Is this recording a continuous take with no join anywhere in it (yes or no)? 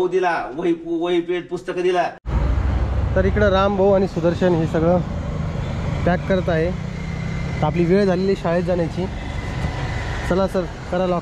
no